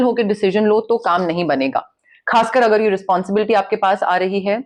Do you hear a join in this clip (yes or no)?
no